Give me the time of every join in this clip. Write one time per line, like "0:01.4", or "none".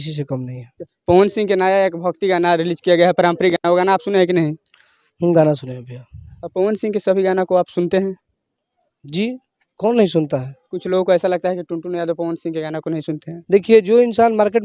none